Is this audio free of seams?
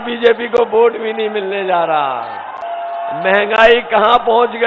yes; 0 cuts

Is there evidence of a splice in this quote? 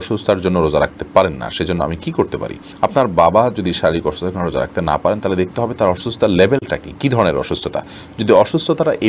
no; 0 cuts

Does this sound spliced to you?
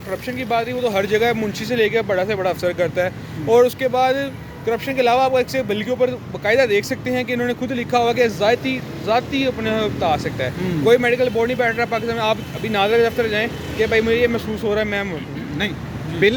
no; 0 cuts

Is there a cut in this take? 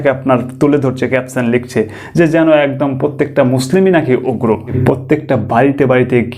yes; 1 cut; at 4.8 s

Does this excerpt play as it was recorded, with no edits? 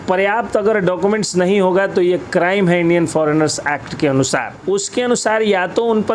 no; 1 cut; at 4.5 s

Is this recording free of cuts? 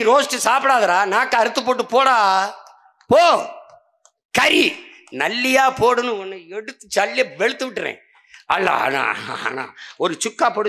yes; 0 cuts

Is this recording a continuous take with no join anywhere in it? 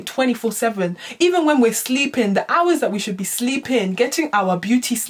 yes; 0 cuts

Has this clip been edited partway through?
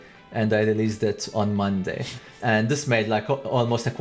yes; 1 cut; at 2.3 s

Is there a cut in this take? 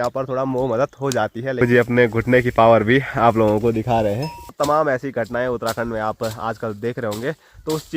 yes; 2 cuts; at 1.6 s, 4.5 s

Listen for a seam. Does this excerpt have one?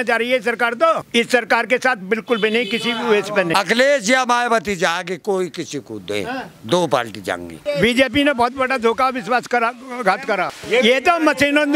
yes; 4 cuts; at 1.0 s, 3.5 s, 7.5 s, 10.6 s

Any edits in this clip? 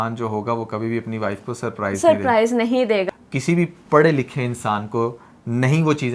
yes; 1 cut; at 3.1 s

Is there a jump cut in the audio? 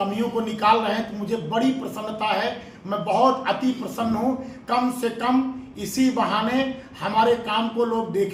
no; 0 cuts

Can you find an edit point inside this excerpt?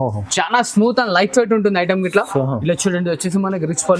no; 0 cuts

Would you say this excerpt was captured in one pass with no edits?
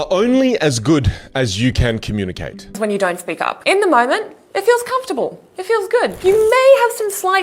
no; 1 cut; at 2.8 s

